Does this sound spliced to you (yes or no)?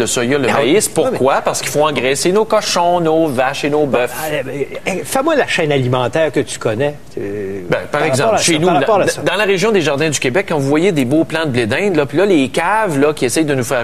yes